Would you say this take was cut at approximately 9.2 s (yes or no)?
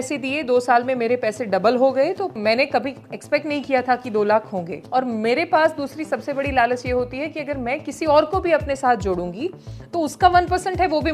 no